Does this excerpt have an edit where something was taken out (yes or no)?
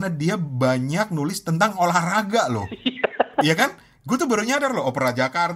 no